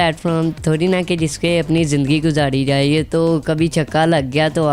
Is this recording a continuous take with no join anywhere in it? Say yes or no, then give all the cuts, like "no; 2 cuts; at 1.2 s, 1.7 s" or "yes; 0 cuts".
yes; 0 cuts